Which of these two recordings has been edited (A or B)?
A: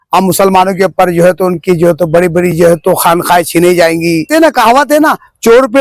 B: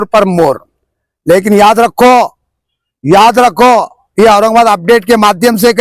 A